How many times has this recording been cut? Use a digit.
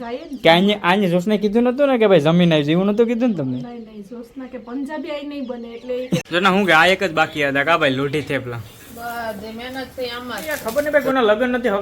2